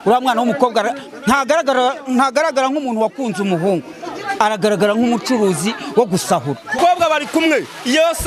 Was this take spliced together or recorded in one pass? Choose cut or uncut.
cut